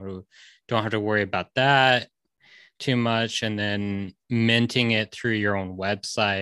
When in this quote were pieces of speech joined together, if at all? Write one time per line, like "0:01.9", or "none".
none